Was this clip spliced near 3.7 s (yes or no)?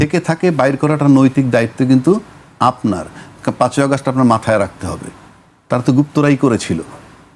no